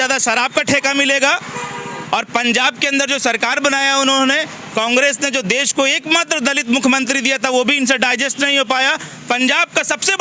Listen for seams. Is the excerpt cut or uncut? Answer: uncut